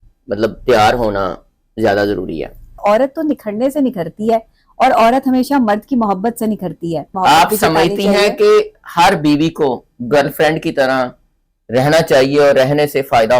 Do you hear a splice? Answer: yes; 2 cuts; at 2.8 s, 7.1 s

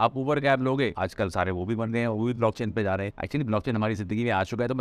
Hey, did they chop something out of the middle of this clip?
yes; 2 cuts; at 0.9 s, 3.1 s

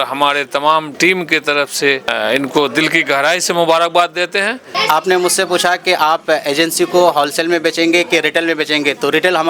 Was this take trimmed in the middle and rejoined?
yes; 3 cuts; at 0.9 s, 2.1 s, 4.7 s

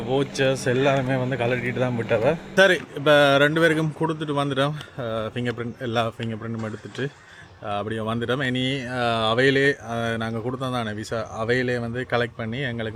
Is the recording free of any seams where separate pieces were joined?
yes; 0 cuts

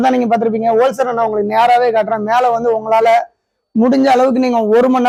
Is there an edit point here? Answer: no; 0 cuts

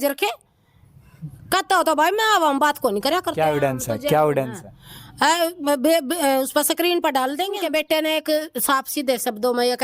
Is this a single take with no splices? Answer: no; 1 cut; at 7.6 s

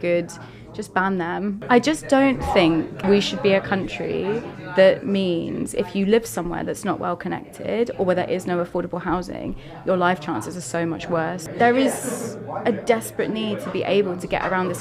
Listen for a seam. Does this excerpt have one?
yes; 3 cuts; at 1.6 s, 2.9 s, 11.4 s

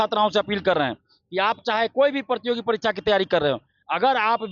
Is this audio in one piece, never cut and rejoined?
yes; 0 cuts

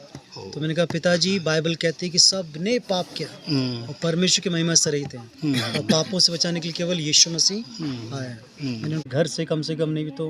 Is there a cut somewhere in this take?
yes; 1 cut; at 9.1 s

